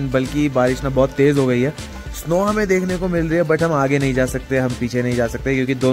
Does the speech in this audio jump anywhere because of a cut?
no; 0 cuts

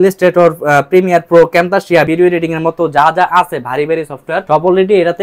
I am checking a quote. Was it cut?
yes; 2 cuts; at 2.1 s, 4.4 s

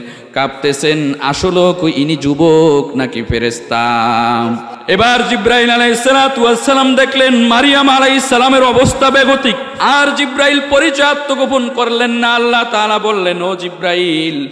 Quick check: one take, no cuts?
no; 2 cuts; at 4.7 s, 9.7 s

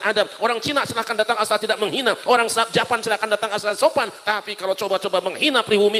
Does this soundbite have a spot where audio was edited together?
no; 0 cuts

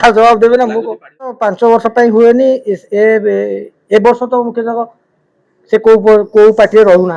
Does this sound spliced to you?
yes; 1 cut; at 1.5 s

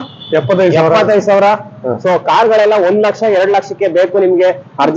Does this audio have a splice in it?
no; 0 cuts

